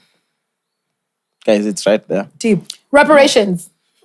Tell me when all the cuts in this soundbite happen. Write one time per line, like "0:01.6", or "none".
none